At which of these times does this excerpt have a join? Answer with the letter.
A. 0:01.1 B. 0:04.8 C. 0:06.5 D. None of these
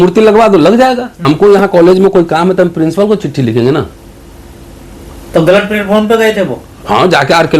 A